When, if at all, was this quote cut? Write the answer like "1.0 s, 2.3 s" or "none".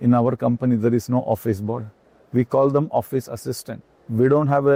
none